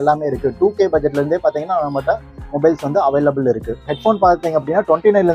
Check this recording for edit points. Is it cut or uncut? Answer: cut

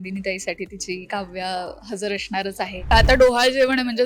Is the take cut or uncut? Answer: cut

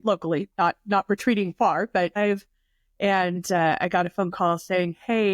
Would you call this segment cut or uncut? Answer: cut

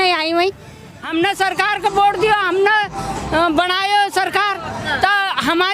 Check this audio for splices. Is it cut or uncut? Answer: cut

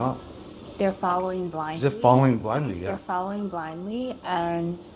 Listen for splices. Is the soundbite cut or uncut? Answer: uncut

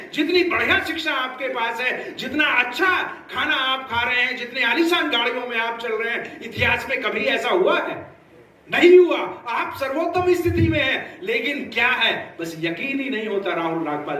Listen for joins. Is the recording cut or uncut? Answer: uncut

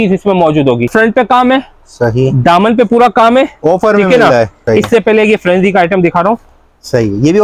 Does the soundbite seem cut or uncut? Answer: cut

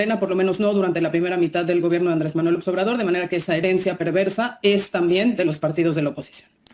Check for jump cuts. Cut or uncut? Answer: uncut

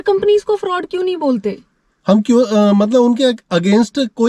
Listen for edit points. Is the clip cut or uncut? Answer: uncut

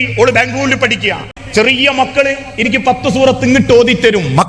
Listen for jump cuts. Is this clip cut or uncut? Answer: cut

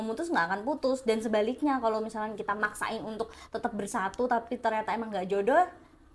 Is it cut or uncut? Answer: uncut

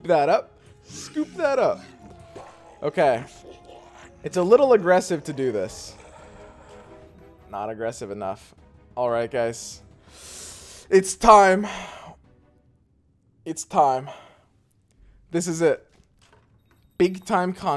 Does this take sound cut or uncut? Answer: uncut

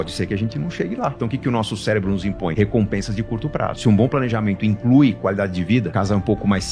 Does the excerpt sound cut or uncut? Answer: cut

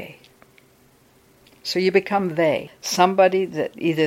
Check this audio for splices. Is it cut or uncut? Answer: cut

